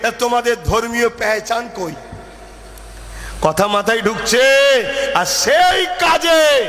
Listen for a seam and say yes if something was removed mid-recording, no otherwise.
no